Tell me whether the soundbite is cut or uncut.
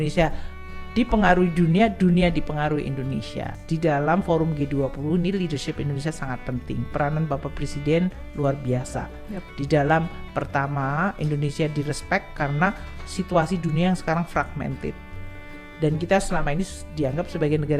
cut